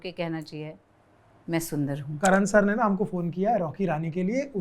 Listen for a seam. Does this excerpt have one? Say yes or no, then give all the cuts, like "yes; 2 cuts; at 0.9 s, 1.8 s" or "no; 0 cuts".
yes; 1 cut; at 2.0 s